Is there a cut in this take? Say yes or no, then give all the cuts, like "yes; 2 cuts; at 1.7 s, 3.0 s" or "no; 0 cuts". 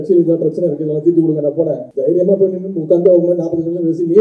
yes; 1 cut; at 1.9 s